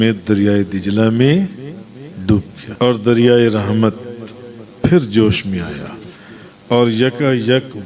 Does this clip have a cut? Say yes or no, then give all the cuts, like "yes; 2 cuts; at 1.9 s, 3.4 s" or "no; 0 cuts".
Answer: yes; 1 cut; at 2.6 s